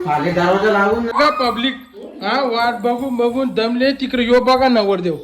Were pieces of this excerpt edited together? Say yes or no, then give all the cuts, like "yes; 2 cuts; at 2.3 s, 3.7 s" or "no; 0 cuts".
yes; 1 cut; at 1.1 s